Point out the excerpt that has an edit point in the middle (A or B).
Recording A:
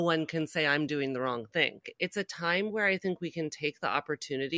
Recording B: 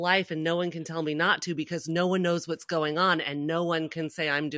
A